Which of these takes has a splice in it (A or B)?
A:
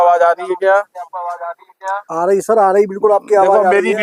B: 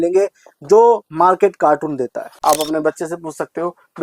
B